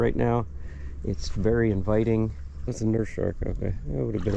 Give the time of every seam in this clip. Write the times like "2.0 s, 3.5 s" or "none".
2.5 s